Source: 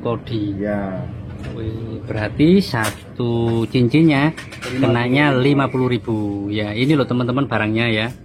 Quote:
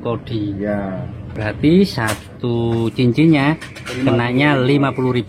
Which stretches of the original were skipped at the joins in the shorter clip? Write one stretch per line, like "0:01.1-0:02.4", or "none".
0:01.3-0:02.1